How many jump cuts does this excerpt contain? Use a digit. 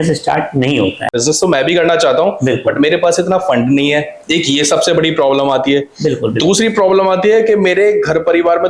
1